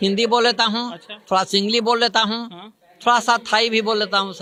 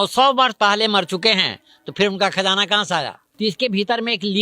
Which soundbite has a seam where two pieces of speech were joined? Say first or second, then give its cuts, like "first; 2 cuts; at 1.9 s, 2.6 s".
second; 1 cut; at 3.2 s